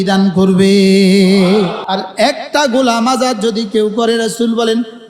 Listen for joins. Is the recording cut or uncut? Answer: cut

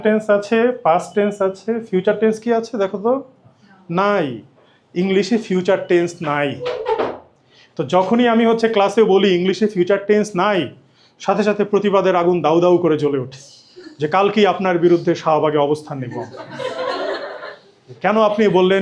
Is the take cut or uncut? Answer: uncut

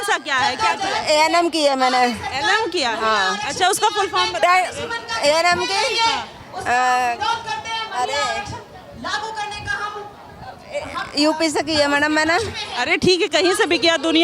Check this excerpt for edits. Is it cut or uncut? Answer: uncut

